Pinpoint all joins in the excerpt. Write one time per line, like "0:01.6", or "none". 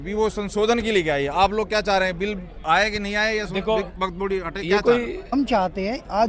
0:05.3